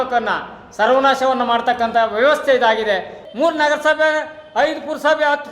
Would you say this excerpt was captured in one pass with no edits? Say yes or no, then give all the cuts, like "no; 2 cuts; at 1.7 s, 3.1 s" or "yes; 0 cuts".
no; 1 cut; at 3.2 s